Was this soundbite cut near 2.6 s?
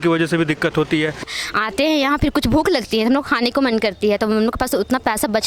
no; 1 cut; at 1.3 s

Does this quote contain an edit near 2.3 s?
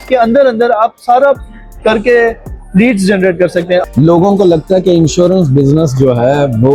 no; 1 cut; at 3.8 s

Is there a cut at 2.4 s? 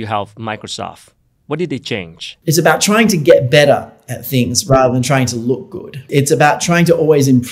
yes; 2 cuts; at 2.4 s, 6.0 s

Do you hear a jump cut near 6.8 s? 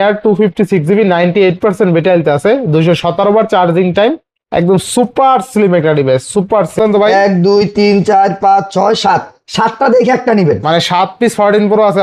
yes; 1 cut; at 6.8 s

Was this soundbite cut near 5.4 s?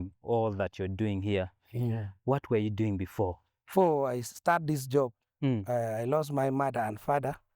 no; 1 cut; at 3.7 s

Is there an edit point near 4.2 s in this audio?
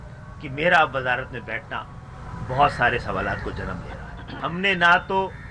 yes; 1 cut; at 4.2 s

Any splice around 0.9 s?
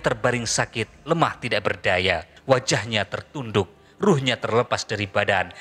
no; 1 cut; at 2.3 s

